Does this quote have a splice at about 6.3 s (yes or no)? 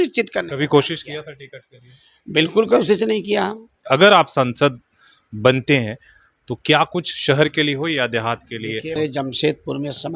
no